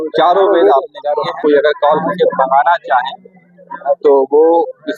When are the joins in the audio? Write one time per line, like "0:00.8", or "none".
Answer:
0:01.3